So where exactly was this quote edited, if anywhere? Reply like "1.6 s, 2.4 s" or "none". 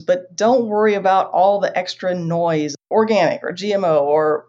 2.9 s